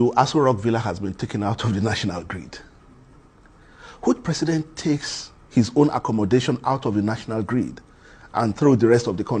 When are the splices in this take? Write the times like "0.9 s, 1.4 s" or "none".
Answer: none